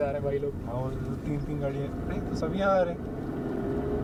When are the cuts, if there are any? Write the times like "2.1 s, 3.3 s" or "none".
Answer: none